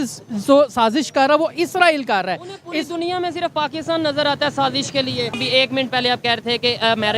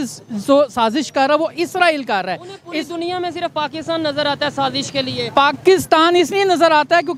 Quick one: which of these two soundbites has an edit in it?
first; 1 cut; at 5.3 s

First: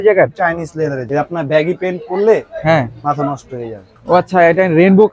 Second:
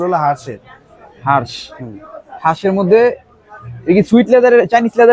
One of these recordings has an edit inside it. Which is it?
first; 2 cuts; at 1.0 s, 3.9 s

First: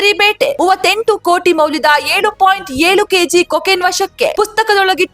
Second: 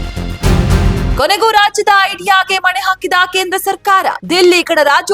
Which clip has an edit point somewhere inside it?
second; 1 cut; at 1.1 s

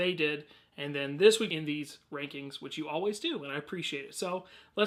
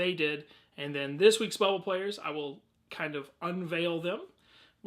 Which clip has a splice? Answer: second; 1 cut; at 1.5 s

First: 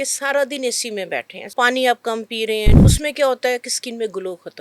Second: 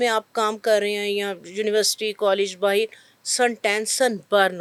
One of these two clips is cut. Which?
first; 2 cuts; at 1.4 s, 2.8 s

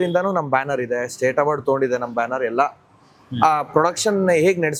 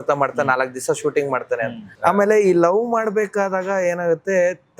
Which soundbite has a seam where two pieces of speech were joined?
second; 1 cut; at 1.9 s

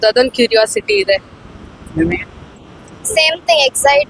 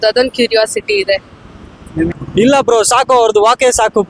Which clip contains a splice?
second; 1 cut; at 2.2 s

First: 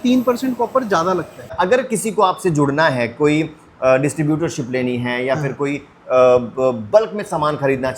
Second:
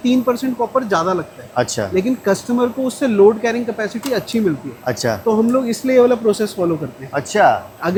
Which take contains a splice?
first; 1 cut; at 1.5 s

